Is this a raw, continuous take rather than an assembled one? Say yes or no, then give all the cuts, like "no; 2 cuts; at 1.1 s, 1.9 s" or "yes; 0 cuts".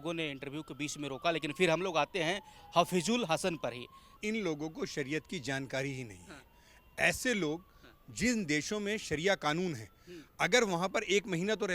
no; 1 cut; at 4.0 s